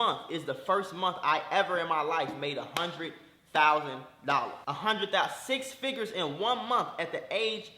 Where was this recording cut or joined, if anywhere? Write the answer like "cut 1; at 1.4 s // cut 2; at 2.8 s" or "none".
cut 1; at 4.6 s